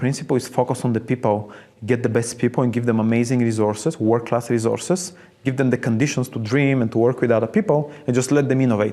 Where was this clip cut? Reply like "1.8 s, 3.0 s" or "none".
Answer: none